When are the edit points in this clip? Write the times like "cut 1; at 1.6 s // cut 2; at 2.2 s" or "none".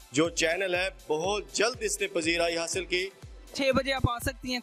cut 1; at 3.5 s